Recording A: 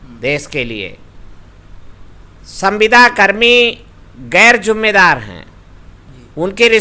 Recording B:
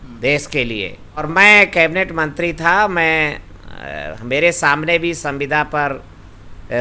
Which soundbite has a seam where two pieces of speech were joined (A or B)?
B